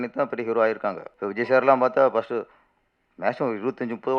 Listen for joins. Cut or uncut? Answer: cut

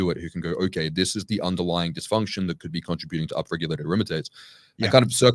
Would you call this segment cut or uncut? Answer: uncut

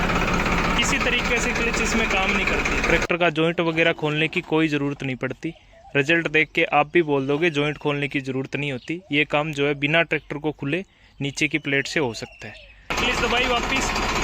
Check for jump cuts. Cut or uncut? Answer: cut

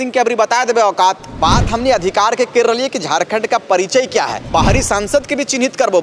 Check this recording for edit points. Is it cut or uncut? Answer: cut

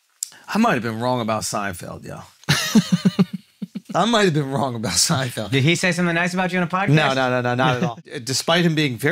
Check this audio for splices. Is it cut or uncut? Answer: cut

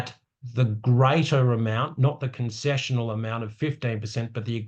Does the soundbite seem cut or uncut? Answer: uncut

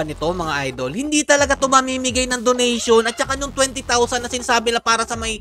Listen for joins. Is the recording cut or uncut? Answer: uncut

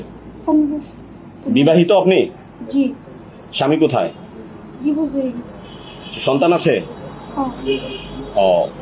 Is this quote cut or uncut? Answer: cut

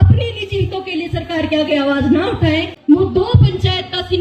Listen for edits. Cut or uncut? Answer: cut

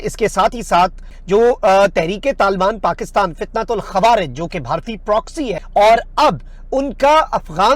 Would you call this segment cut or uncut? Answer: cut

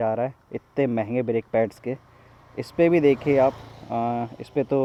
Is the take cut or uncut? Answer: uncut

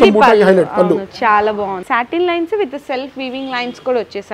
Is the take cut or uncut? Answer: cut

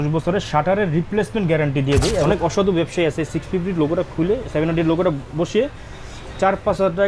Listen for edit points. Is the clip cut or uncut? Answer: cut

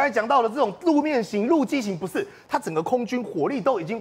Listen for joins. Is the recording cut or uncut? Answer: uncut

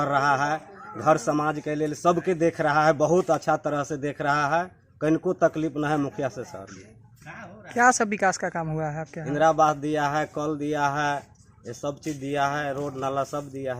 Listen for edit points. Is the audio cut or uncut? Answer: uncut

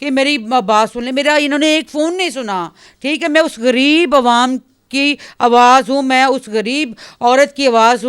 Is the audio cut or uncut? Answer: uncut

